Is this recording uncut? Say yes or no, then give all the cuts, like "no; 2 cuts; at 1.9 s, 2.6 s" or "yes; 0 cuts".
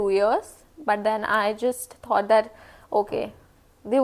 yes; 0 cuts